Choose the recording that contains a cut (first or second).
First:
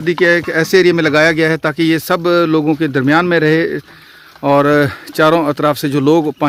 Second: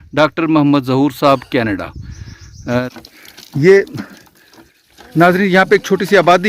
second